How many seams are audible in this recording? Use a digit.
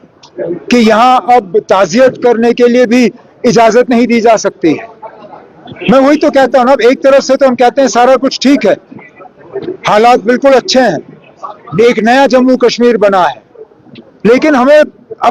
0